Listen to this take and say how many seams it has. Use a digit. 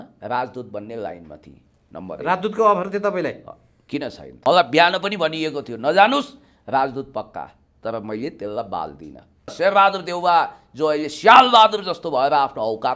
2